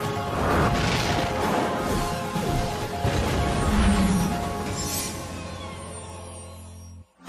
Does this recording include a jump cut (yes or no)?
yes